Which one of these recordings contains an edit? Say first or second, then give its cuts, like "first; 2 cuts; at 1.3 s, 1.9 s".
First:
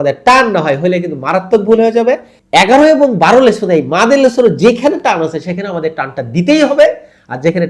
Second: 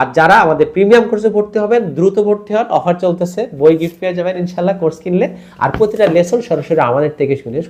first; 1 cut; at 2.3 s